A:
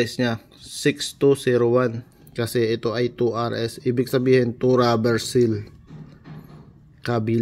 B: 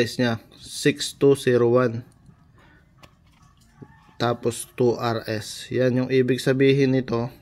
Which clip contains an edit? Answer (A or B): A